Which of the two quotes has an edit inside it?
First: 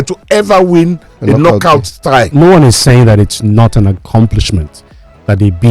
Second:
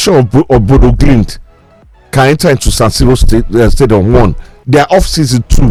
first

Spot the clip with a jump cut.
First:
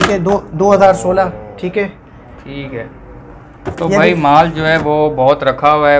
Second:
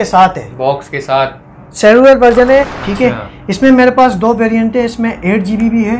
second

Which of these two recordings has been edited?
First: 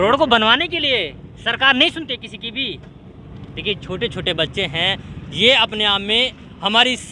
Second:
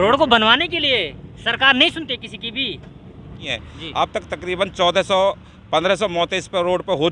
second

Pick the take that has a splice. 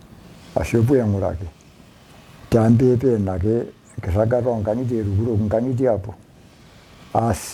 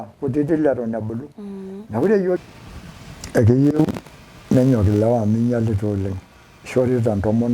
second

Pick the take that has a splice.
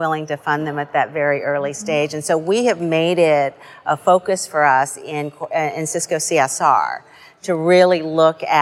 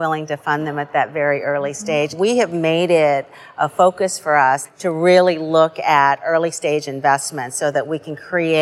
second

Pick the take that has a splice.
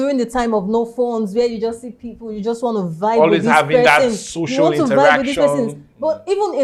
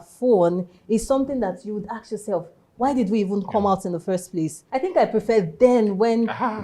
second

